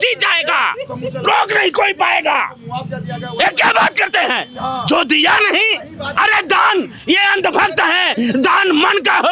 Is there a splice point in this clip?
no; 0 cuts

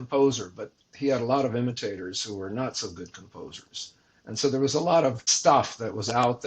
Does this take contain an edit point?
yes; 1 cut; at 5.3 s

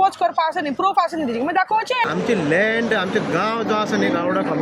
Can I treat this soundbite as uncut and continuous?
no; 1 cut; at 2.1 s

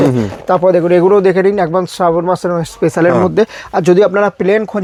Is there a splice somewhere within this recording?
no; 0 cuts

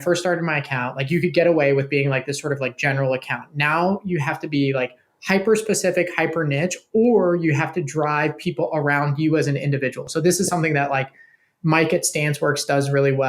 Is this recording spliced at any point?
yes; 1 cut; at 10.0 s

